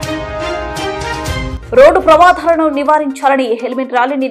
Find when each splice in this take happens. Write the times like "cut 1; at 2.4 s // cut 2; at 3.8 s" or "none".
cut 1; at 1.5 s